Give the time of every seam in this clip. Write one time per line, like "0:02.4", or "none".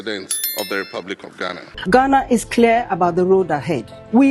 0:01.6